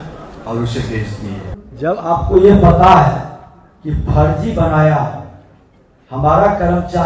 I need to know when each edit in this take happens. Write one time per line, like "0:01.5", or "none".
0:01.6